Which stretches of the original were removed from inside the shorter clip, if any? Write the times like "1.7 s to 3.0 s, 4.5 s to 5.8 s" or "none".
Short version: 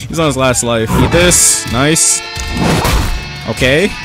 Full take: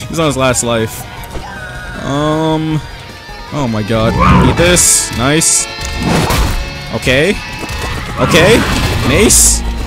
0.9 s to 4.4 s